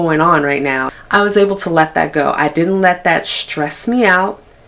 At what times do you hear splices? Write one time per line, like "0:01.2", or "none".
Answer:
0:00.9